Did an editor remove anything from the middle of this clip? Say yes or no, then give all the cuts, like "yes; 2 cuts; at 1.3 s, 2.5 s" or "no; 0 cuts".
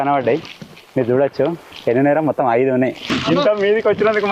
yes; 1 cut; at 3.0 s